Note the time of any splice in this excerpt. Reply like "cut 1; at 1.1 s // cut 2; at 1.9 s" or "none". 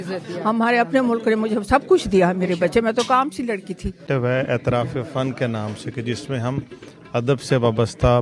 cut 1; at 4.1 s